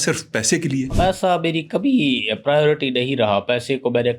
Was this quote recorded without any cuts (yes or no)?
no